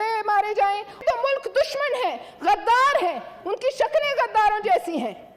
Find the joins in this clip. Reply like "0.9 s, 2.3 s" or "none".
1.0 s